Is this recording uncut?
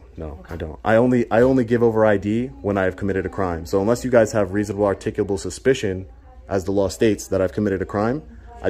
yes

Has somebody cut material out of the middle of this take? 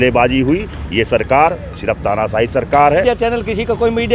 yes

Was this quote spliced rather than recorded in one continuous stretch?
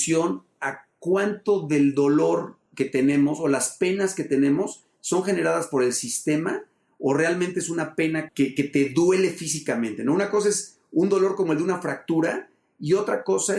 yes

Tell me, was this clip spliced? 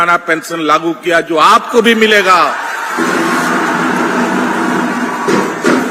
no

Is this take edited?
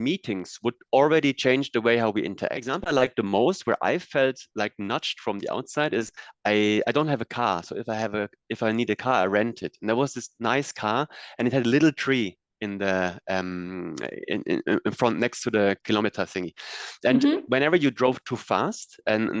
yes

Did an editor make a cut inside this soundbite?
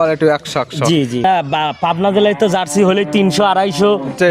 yes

